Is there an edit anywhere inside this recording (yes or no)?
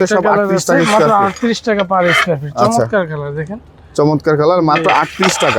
no